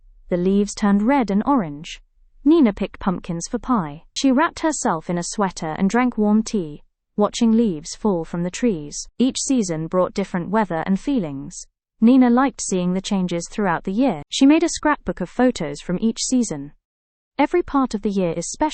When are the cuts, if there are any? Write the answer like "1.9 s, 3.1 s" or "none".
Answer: 4.0 s